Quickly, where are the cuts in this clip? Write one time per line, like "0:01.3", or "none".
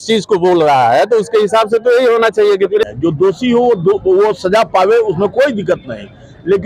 0:02.8